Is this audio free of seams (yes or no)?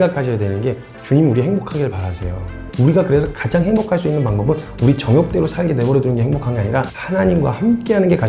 no